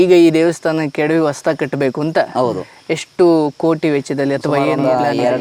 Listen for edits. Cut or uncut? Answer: uncut